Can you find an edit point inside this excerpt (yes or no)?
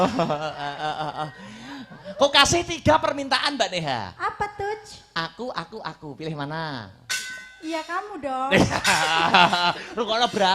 yes